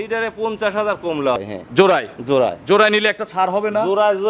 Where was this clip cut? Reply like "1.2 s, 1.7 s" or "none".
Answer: 1.4 s